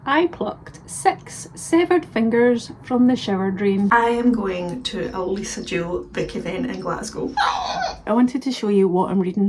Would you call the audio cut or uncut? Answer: cut